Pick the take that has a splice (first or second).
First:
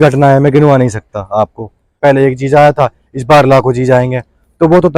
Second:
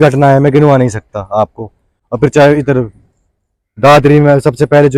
first